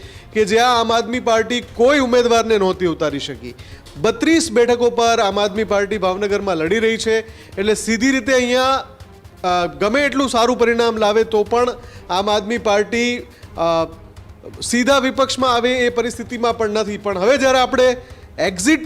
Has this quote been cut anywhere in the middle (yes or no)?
no